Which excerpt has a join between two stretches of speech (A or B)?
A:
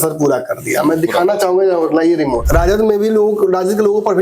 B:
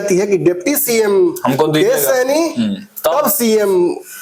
A